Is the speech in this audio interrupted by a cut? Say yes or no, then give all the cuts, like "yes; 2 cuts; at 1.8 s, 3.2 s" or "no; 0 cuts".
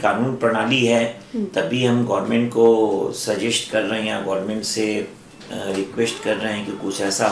no; 0 cuts